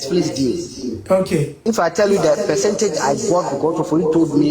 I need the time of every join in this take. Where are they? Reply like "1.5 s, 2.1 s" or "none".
0.9 s, 1.5 s